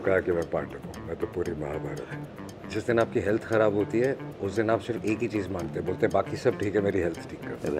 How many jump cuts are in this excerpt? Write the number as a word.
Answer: one